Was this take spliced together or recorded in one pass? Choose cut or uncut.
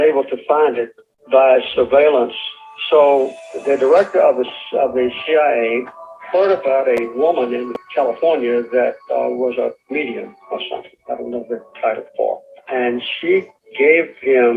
uncut